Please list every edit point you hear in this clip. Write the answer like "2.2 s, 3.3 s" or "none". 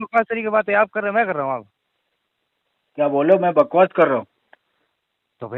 none